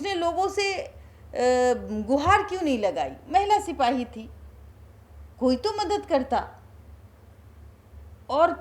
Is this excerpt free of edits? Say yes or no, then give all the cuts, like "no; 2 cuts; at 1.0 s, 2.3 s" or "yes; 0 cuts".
yes; 0 cuts